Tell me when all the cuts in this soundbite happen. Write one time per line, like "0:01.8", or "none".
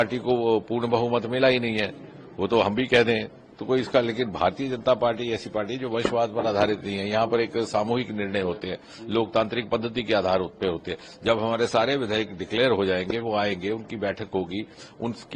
none

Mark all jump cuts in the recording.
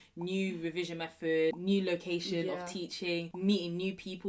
0:03.3

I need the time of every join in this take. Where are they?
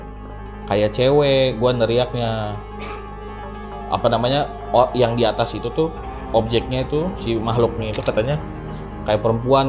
none

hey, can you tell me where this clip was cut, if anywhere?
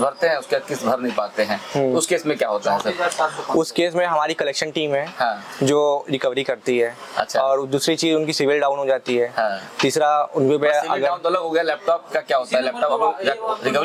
none

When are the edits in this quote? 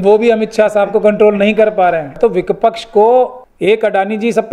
0:02.2
0:03.4

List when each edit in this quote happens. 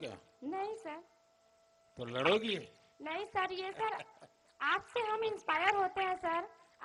none

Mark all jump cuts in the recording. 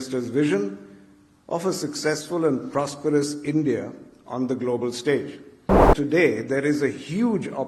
0:05.9

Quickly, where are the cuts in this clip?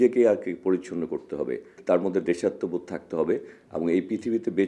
0:01.8
0:03.6

